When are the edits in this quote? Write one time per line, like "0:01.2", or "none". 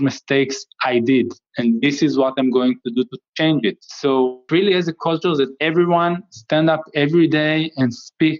0:05.6